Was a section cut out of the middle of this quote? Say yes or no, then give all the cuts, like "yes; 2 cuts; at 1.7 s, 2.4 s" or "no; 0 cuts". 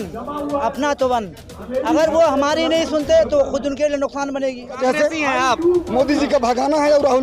yes; 1 cut; at 4.8 s